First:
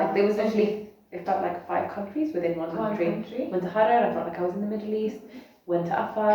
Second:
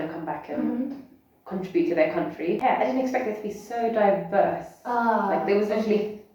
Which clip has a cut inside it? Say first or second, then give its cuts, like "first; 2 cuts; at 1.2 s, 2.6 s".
second; 1 cut; at 2.6 s